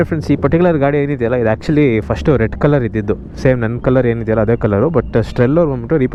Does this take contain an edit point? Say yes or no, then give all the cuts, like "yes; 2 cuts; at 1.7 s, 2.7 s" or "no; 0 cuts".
no; 0 cuts